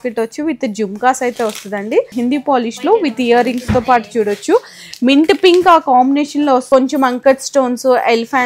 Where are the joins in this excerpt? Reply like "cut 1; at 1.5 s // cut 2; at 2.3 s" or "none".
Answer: cut 1; at 2.1 s // cut 2; at 6.6 s

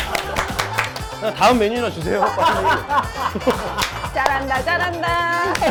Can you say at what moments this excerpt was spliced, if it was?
none

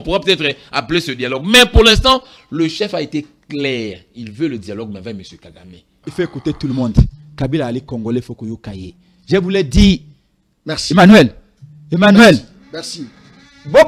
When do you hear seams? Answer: cut 1; at 5.9 s

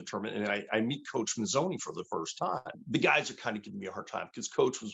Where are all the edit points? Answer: cut 1; at 2.8 s

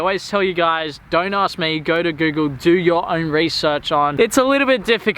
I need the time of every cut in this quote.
cut 1; at 4.1 s

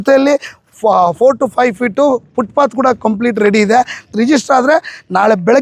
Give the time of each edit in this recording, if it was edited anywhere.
cut 1; at 4.1 s

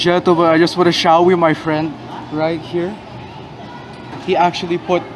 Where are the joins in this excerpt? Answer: none

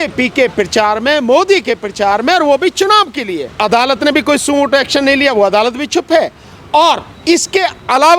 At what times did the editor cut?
cut 1; at 3.5 s // cut 2; at 7.1 s

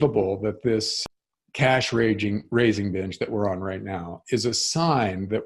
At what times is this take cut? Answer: cut 1; at 0.9 s

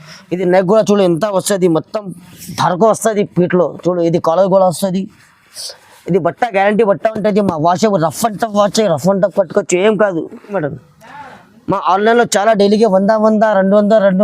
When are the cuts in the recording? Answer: cut 1; at 10.6 s

